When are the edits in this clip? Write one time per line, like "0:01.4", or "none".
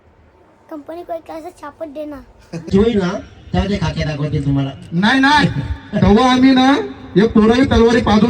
0:02.6